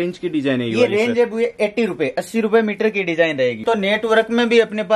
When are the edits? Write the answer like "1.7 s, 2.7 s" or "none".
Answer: 3.6 s